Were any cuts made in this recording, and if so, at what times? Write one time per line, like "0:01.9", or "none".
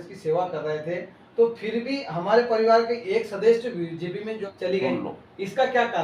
0:04.4